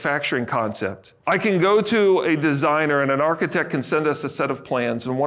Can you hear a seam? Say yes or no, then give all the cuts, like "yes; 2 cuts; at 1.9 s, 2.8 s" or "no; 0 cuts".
yes; 1 cut; at 1.1 s